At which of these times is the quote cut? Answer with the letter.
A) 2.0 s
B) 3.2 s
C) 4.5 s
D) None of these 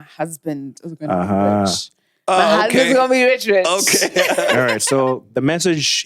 C